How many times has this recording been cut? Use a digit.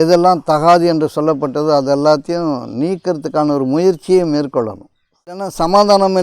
1